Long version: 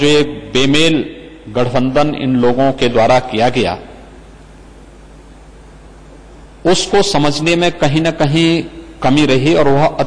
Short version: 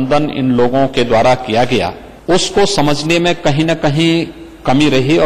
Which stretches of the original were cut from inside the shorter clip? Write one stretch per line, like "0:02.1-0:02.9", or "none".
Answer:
0:03.9-0:06.4